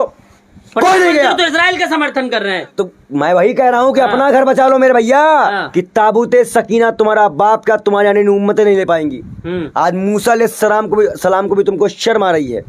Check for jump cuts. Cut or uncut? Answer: cut